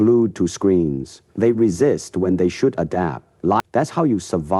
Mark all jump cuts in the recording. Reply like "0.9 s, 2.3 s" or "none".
3.6 s